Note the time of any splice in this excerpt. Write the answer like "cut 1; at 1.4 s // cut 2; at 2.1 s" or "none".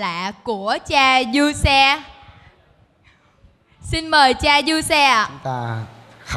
cut 1; at 5.4 s